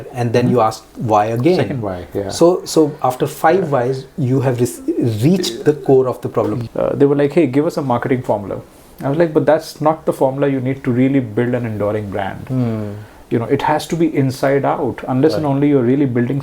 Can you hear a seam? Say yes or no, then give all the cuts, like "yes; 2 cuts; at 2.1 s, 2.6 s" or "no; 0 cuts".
yes; 1 cut; at 6.6 s